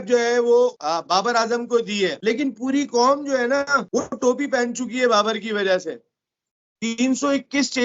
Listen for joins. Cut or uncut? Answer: cut